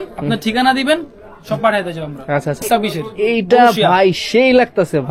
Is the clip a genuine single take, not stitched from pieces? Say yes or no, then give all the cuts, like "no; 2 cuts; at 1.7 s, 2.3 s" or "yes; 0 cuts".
no; 1 cut; at 2.6 s